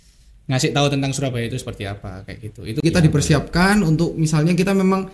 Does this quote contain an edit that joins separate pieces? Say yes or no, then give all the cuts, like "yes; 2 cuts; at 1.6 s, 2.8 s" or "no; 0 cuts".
yes; 1 cut; at 2.8 s